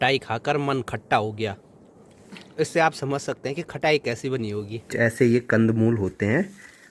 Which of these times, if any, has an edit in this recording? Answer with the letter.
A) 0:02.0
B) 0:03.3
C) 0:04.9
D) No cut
C